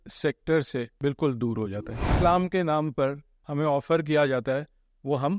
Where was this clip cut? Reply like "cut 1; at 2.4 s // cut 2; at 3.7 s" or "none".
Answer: cut 1; at 0.9 s // cut 2; at 2.1 s